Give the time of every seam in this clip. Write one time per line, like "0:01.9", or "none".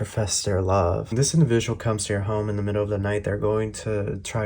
0:01.1